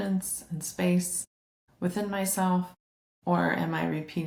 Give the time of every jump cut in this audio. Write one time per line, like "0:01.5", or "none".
none